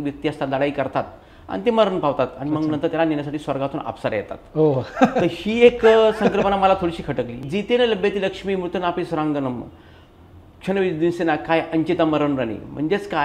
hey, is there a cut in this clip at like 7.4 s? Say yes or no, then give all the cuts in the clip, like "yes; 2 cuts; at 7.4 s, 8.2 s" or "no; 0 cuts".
yes; 1 cut; at 7.4 s